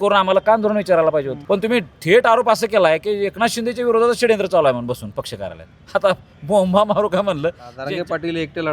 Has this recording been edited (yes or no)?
yes